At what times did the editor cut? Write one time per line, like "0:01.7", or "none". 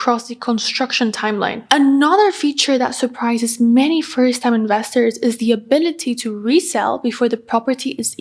0:01.6